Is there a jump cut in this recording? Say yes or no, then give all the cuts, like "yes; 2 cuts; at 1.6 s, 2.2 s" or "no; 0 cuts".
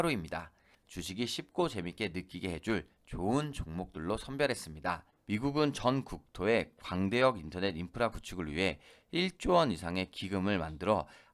yes; 1 cut; at 5.1 s